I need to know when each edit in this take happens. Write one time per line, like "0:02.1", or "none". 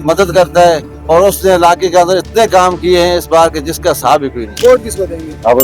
none